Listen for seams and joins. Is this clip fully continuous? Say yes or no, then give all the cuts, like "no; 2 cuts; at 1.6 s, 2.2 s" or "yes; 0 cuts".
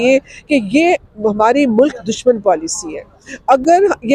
yes; 0 cuts